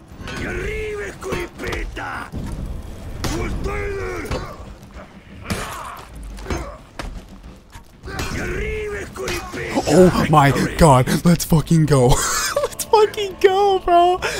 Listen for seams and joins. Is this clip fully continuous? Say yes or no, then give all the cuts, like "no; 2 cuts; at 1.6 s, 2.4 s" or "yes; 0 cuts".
yes; 0 cuts